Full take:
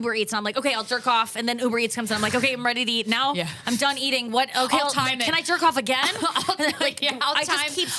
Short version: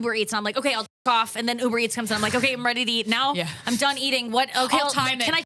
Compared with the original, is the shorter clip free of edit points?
yes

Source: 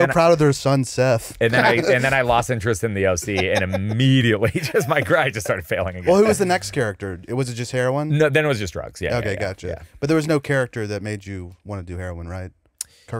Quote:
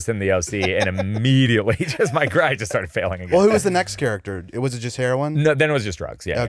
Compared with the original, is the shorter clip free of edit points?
yes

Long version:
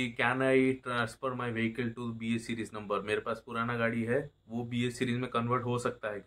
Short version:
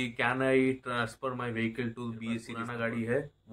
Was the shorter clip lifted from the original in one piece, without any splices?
no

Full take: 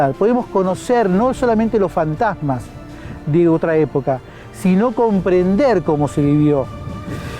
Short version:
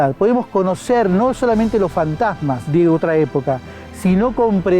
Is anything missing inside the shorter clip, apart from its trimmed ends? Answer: yes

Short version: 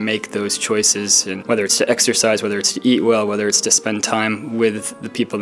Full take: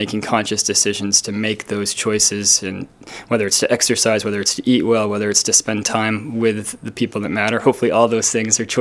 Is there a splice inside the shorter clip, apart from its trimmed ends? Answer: yes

